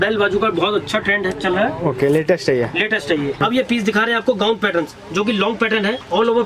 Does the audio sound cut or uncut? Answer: cut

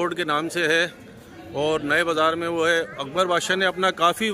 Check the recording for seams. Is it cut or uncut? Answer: uncut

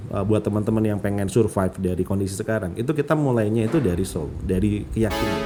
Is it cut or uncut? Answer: uncut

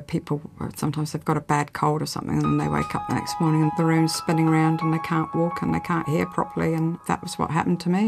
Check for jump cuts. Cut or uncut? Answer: cut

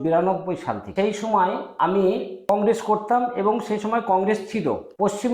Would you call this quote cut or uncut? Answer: uncut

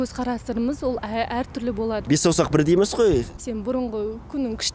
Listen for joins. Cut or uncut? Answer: cut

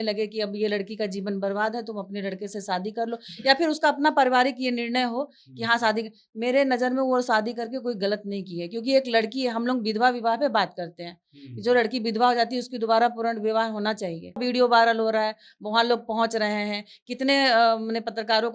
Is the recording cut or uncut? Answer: cut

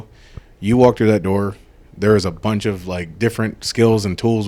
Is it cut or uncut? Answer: uncut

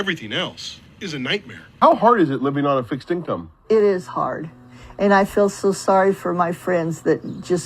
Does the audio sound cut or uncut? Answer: cut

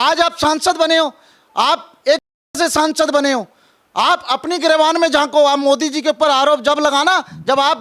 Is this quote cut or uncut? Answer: uncut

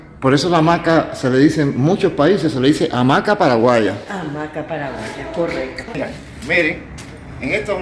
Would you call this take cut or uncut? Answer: cut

